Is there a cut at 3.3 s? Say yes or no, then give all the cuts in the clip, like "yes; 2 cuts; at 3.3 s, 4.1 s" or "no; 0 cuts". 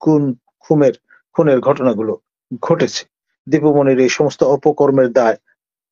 yes; 1 cut; at 3.3 s